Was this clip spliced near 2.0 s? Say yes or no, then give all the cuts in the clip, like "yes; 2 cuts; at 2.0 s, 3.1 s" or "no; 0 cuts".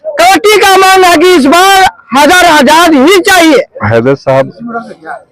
no; 1 cut; at 3.8 s